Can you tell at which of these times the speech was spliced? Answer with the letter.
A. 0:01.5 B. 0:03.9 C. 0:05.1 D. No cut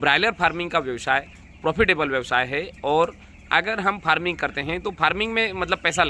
D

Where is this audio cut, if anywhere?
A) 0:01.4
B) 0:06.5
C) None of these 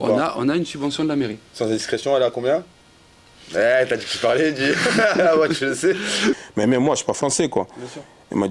B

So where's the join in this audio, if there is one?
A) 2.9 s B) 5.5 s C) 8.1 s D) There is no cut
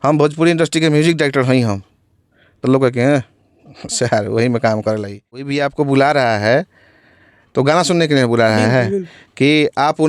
B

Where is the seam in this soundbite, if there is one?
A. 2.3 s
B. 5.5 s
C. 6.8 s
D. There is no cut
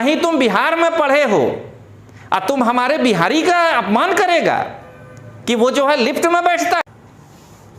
C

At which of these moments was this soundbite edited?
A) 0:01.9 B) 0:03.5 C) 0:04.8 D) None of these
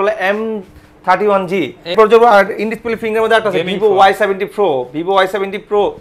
A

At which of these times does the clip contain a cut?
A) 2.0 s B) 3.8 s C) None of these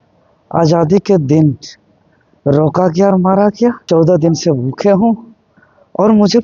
B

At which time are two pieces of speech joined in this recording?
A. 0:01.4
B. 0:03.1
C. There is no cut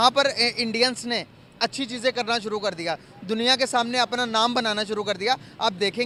C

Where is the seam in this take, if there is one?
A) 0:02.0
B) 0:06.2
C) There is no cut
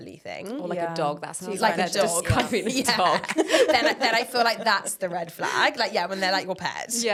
C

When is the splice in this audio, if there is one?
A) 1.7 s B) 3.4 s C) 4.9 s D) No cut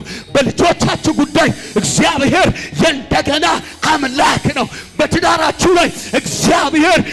D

